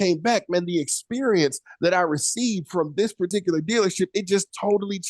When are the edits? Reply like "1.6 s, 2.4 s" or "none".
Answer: 3.3 s

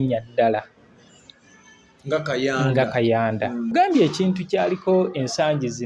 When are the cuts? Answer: 3.7 s

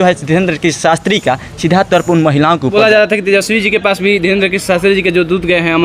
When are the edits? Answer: 2.7 s

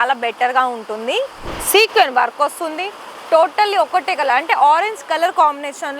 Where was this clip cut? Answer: 1.5 s

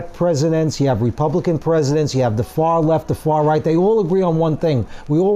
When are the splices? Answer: none

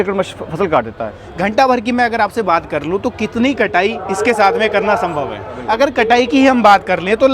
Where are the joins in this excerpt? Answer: 1.2 s, 5.6 s

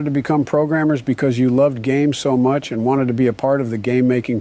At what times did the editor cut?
none

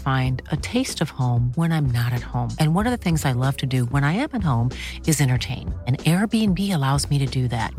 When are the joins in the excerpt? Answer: none

